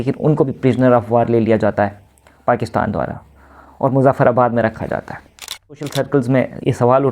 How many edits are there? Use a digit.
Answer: 1